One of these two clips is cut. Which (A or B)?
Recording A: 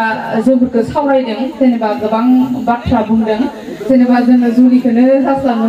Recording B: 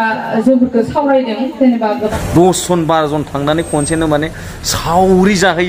B